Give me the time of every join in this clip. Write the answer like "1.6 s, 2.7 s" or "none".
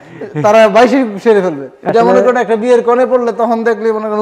1.9 s